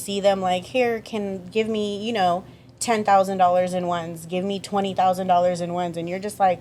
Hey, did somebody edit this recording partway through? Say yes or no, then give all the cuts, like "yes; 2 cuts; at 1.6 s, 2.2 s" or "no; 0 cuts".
no; 0 cuts